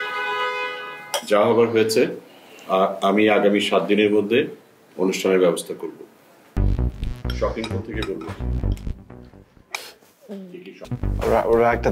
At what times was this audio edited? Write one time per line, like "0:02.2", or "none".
0:06.6
0:10.8